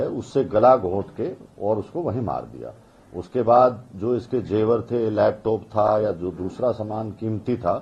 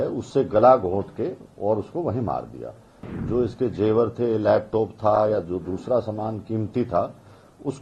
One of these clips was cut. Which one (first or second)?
second